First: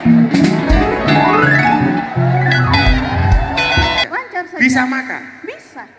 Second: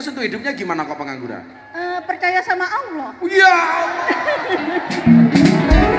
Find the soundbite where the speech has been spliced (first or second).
first